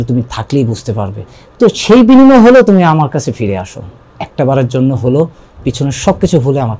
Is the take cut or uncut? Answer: uncut